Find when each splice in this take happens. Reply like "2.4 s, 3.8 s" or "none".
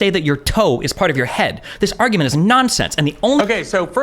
3.0 s